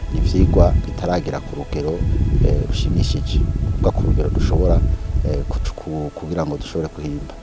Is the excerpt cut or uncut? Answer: uncut